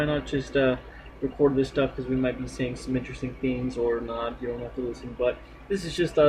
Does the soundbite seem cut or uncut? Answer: uncut